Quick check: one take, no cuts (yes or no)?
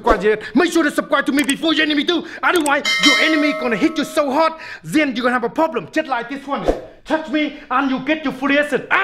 yes